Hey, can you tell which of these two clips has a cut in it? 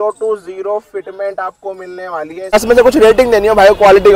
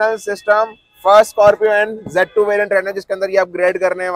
first; 1 cut; at 2.5 s

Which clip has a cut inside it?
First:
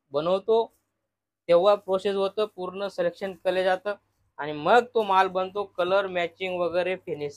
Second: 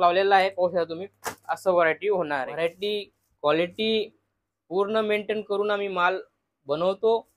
second; 1 cut; at 2.5 s

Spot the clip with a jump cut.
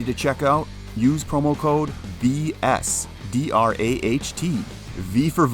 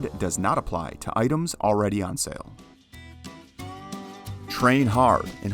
second; 1 cut; at 2.5 s

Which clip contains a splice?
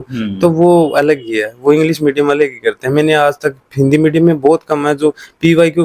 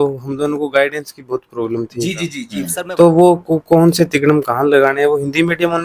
second; 1 cut; at 2.4 s

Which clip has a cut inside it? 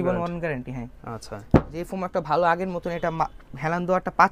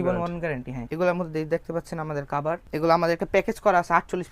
second; 2 cuts; at 0.8 s, 2.6 s

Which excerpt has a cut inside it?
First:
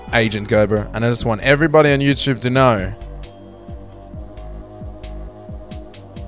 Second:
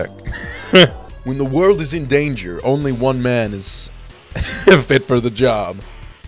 second; 1 cut; at 1.0 s

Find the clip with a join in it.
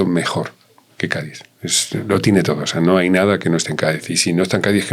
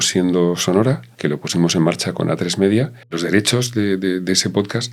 second; 2 cuts; at 1.1 s, 3.0 s

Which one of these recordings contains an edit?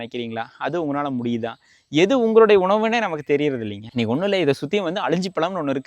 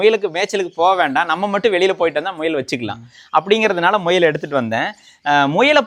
first; 1 cut; at 3.8 s

